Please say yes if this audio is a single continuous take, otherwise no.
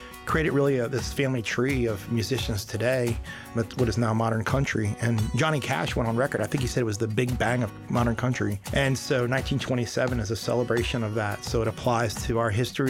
no